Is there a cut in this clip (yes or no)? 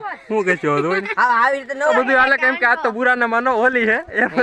yes